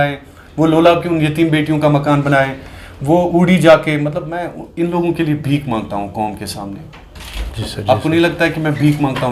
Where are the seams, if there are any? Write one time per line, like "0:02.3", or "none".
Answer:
none